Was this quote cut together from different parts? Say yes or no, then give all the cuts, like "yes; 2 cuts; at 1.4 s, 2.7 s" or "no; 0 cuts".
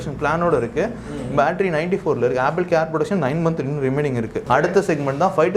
yes; 1 cut; at 4.4 s